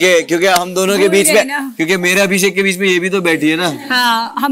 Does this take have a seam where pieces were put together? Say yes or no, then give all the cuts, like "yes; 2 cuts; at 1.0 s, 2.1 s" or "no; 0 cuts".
no; 0 cuts